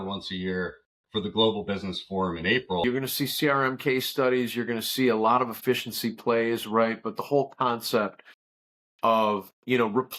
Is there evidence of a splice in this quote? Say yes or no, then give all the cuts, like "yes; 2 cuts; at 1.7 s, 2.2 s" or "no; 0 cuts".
yes; 1 cut; at 2.8 s